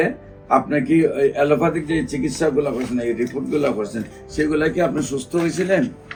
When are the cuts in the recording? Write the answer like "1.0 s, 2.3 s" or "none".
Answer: none